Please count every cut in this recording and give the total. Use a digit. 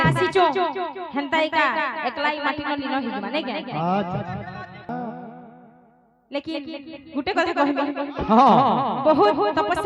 1